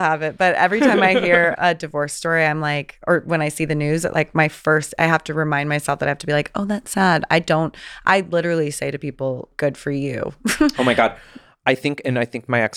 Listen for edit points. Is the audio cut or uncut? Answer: cut